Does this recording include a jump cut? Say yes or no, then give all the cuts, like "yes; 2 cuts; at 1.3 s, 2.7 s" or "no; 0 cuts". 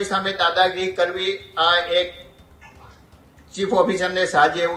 no; 0 cuts